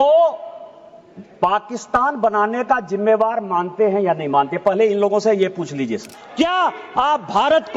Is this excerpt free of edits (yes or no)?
no